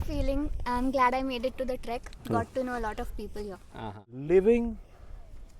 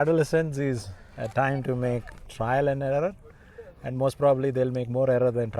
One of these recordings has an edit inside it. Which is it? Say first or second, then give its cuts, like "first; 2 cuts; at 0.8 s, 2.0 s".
first; 1 cut; at 4.2 s